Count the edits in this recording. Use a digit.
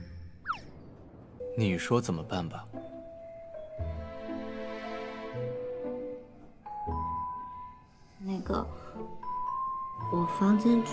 1